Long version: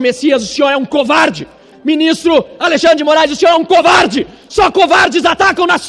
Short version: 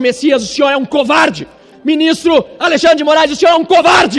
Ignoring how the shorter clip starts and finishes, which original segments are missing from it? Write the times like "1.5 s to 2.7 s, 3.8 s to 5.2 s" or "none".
none